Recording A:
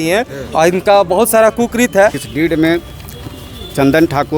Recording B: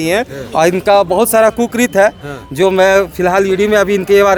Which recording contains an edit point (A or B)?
A